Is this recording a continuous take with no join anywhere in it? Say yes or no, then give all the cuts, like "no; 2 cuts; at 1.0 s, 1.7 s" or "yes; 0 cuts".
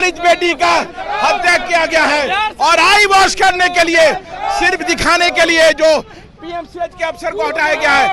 yes; 0 cuts